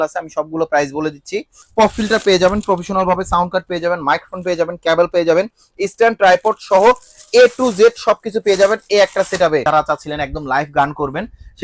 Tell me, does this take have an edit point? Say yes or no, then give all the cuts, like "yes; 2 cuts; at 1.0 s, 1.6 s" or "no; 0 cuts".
yes; 2 cuts; at 1.6 s, 9.6 s